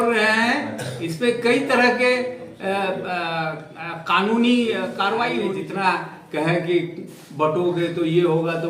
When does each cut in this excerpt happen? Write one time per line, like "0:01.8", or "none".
0:05.5